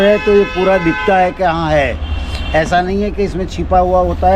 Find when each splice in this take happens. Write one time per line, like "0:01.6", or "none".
none